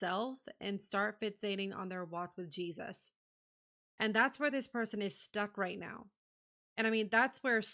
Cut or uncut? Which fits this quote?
uncut